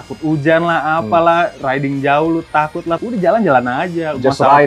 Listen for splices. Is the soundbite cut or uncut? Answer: cut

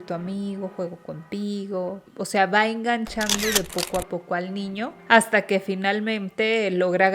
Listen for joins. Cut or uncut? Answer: cut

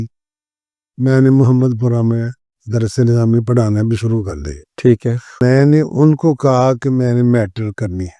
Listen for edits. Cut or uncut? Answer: cut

